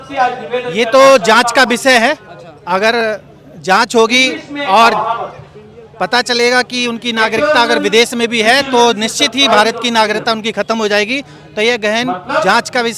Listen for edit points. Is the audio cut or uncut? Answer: uncut